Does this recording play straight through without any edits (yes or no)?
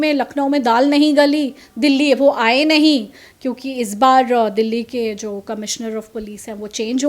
yes